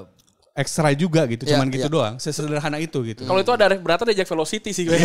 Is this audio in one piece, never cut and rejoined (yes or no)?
yes